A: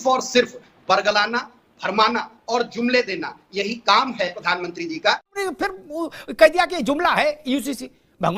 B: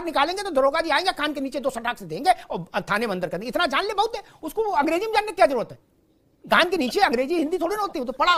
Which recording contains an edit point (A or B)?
A